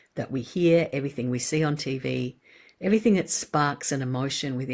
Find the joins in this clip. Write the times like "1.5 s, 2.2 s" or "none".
none